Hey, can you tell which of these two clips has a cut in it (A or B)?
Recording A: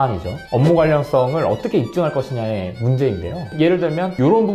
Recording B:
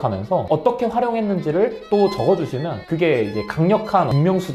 A